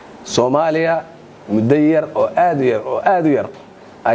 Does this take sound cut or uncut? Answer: uncut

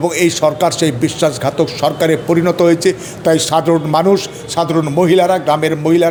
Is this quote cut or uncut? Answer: uncut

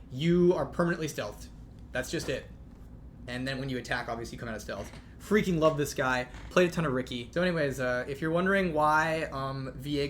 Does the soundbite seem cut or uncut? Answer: cut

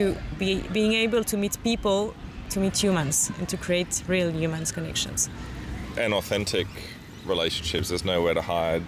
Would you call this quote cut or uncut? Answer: cut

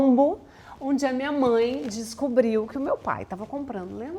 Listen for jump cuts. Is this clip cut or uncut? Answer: uncut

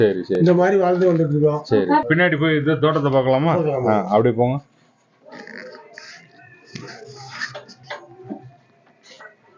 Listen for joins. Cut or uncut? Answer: cut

